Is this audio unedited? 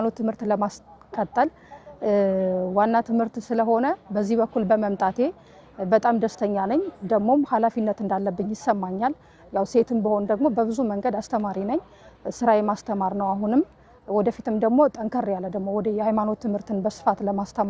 yes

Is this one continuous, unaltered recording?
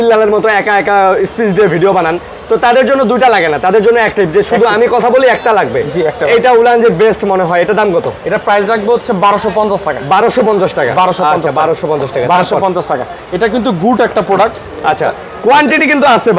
yes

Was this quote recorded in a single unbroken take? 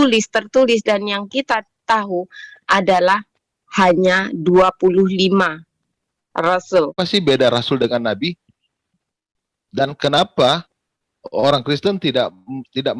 no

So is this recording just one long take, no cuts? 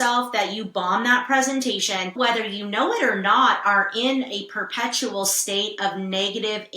no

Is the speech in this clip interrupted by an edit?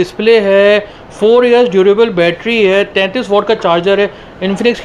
no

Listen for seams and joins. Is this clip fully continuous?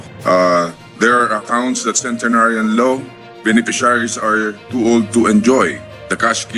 yes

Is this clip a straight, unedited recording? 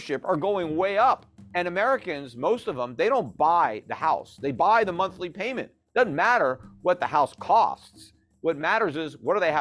no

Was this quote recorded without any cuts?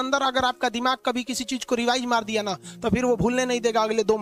yes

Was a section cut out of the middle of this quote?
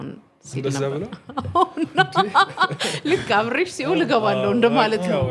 no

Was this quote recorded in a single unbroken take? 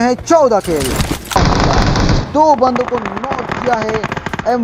no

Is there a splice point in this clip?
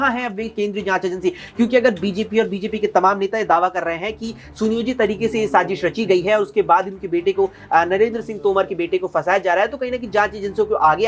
no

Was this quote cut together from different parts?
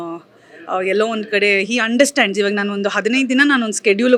no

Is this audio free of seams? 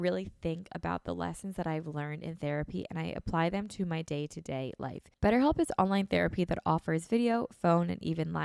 no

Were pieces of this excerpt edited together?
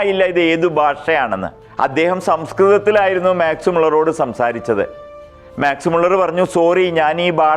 yes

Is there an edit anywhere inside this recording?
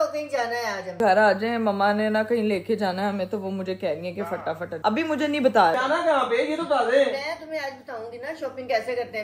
yes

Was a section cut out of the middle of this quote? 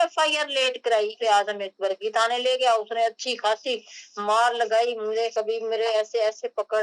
yes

